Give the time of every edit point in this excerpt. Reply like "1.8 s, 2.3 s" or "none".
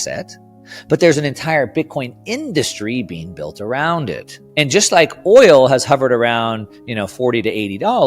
4.3 s